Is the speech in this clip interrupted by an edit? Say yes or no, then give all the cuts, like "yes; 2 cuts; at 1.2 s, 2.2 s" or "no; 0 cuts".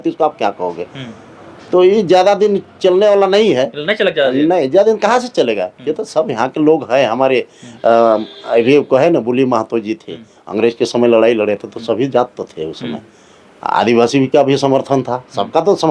no; 0 cuts